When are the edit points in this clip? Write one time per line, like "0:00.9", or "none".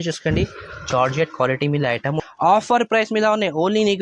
0:02.2